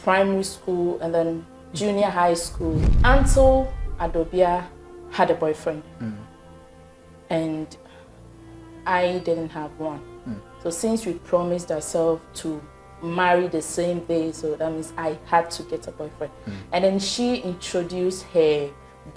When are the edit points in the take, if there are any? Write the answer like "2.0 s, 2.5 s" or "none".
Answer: 2.9 s